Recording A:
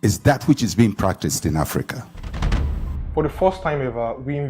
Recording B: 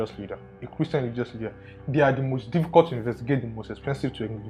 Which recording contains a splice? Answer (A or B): A